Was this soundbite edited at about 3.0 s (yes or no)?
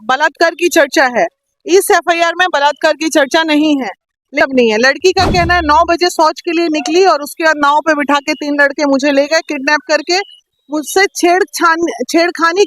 no